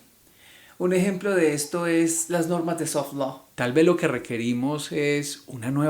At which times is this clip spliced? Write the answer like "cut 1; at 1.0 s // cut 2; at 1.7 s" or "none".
cut 1; at 3.4 s